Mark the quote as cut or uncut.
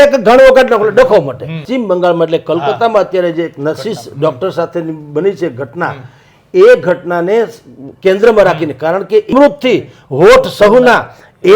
cut